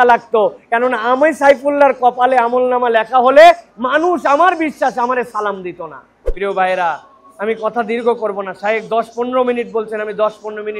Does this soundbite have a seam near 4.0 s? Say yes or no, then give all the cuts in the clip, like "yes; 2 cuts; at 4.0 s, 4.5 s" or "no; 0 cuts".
no; 1 cut; at 6.3 s